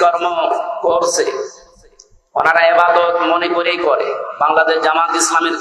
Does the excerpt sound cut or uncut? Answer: uncut